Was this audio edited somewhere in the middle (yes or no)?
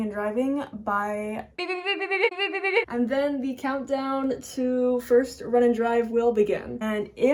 no